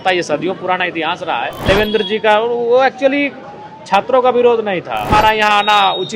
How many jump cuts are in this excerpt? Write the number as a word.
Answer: two